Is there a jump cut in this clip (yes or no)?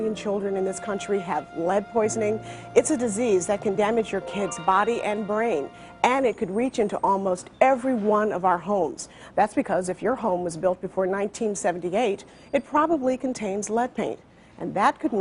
yes